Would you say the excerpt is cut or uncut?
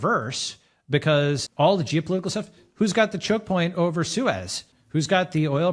uncut